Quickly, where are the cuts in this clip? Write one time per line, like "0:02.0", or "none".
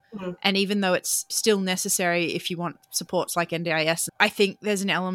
0:01.3